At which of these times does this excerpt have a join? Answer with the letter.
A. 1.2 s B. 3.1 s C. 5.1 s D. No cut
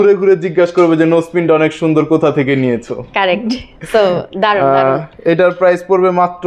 D